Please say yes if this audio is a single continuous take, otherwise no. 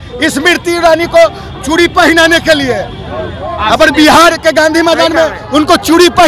yes